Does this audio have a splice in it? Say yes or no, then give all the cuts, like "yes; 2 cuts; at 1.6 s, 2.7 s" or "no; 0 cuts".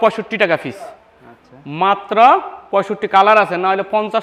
no; 0 cuts